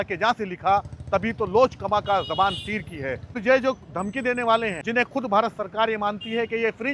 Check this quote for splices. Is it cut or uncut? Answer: cut